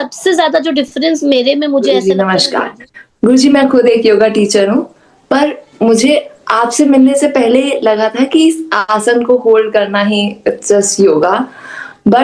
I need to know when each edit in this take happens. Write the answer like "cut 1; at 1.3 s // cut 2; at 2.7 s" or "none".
cut 1; at 1.9 s